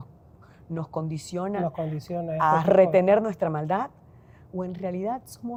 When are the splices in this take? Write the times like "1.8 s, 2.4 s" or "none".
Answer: none